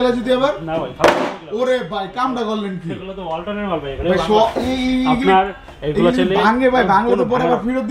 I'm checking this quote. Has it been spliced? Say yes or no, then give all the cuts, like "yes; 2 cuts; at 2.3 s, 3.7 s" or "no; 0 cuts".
no; 0 cuts